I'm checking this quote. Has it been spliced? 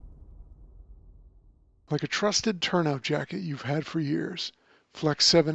yes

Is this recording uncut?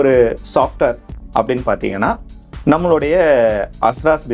yes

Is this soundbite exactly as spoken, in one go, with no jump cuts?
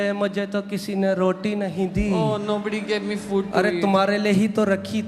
yes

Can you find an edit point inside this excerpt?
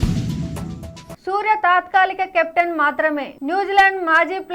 yes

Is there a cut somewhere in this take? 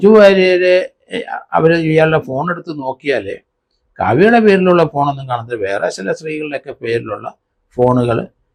no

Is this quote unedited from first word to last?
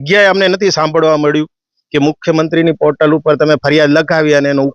yes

